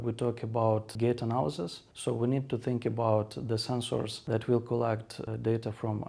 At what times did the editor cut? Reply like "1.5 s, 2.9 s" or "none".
0.9 s, 4.2 s, 5.2 s